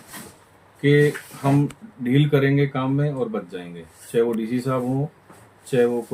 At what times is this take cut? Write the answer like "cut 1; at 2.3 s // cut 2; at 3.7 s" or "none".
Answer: none